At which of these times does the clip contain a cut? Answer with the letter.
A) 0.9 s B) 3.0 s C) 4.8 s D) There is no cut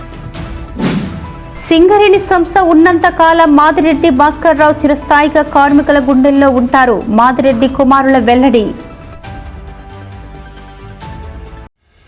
A